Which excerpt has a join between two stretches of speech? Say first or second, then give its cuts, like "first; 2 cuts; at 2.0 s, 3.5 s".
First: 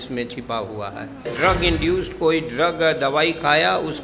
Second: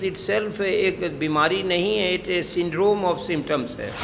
first; 1 cut; at 1.3 s